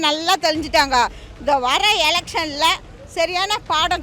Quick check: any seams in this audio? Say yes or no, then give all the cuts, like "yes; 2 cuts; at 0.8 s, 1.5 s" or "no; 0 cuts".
no; 0 cuts